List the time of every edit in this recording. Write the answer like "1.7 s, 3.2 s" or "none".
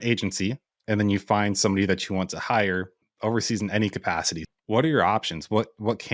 3.0 s, 4.4 s